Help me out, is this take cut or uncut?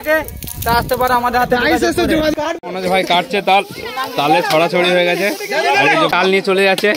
cut